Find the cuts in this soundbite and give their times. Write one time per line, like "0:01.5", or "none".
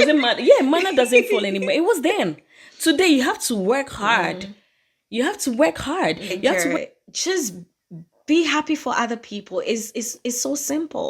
0:06.7